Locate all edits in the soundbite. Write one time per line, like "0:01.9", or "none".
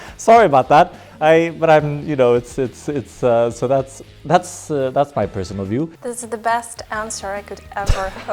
0:06.0